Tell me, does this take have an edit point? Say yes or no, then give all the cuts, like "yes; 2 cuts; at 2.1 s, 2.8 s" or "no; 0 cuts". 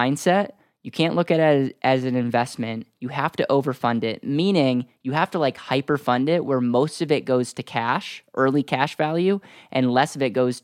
no; 0 cuts